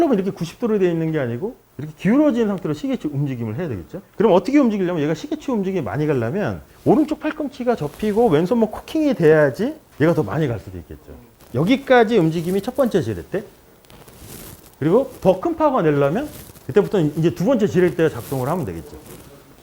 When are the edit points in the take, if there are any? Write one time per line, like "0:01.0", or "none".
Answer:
none